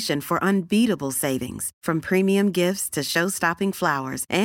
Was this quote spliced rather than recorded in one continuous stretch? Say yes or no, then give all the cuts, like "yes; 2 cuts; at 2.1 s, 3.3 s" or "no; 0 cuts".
no; 0 cuts